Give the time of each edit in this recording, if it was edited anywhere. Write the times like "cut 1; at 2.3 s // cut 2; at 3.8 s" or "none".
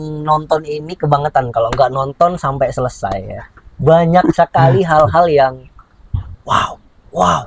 none